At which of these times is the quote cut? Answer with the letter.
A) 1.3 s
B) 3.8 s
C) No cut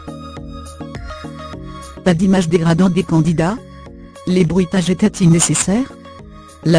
A